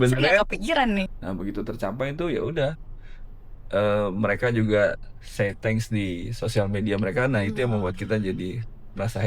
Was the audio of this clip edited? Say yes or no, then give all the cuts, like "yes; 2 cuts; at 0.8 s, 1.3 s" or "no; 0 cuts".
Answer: yes; 1 cut; at 1.1 s